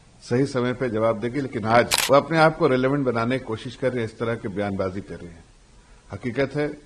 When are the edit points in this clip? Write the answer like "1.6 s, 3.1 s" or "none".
2.0 s